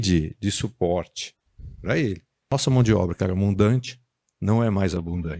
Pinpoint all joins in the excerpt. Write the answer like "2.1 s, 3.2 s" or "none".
2.5 s